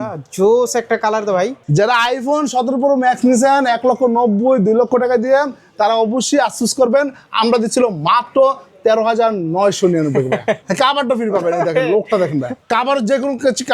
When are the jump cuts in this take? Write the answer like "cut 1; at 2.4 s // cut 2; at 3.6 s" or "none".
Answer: cut 1; at 1.6 s // cut 2; at 10.7 s // cut 3; at 12.6 s